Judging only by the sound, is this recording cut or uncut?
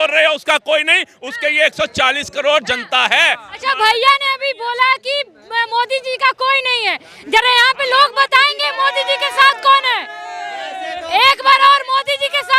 uncut